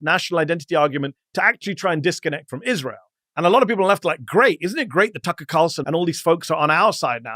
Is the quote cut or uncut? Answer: cut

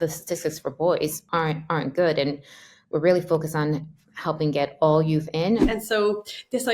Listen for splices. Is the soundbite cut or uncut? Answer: cut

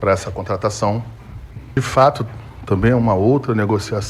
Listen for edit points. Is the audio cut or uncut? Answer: cut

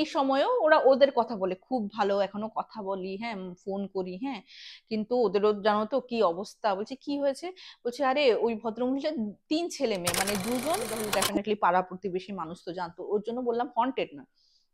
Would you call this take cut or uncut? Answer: cut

